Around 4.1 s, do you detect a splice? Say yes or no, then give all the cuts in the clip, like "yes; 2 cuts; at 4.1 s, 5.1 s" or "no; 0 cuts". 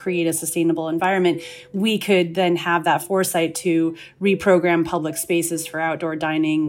no; 1 cut; at 1.0 s